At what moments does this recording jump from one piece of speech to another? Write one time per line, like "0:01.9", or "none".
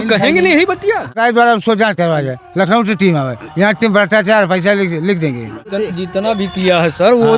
0:01.2
0:05.7